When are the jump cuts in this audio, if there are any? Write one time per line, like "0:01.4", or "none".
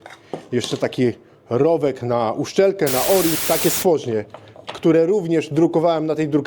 0:03.4

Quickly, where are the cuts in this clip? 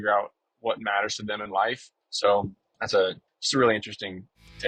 0:02.0

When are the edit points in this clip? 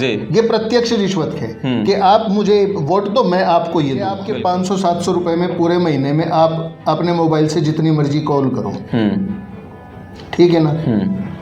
0:04.3

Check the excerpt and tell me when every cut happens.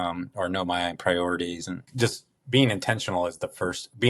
0:01.9

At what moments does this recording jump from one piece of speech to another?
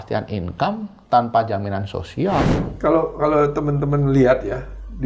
0:02.6

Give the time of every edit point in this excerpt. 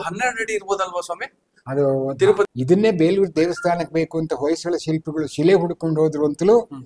0:02.5

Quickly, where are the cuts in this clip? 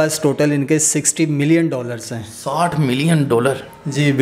none

